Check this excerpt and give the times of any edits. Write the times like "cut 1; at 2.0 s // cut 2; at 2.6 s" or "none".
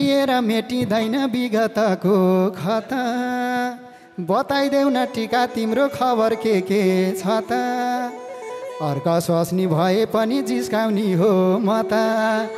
none